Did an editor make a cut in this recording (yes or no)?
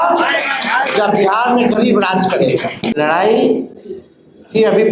yes